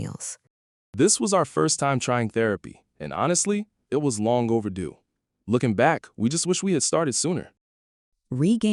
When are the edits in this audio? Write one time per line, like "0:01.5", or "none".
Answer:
none